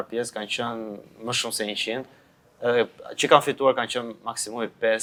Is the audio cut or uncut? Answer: uncut